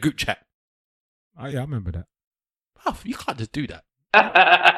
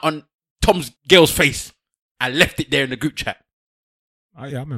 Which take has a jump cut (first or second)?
second